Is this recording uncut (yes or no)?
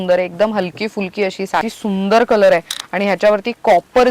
no